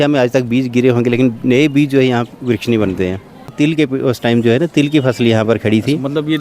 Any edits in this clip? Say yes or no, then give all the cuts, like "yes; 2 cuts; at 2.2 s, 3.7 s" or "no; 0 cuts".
yes; 1 cut; at 3.5 s